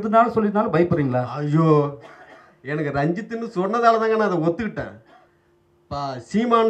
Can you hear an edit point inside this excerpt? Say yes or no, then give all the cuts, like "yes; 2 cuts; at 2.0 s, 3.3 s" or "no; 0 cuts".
no; 0 cuts